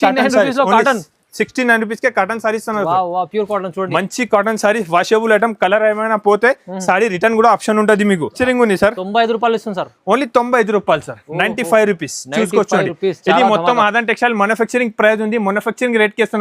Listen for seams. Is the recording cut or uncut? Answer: cut